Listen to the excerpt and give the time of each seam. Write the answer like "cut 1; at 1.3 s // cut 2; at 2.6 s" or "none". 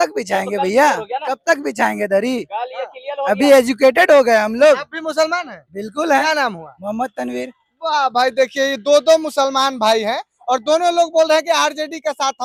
none